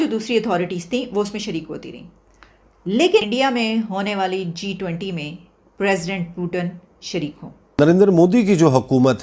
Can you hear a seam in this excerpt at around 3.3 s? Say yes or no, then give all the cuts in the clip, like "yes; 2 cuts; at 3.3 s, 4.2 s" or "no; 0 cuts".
yes; 2 cuts; at 3.3 s, 7.8 s